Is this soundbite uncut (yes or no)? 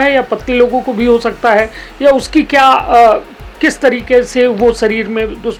yes